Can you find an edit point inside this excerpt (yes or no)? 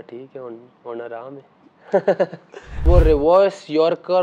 yes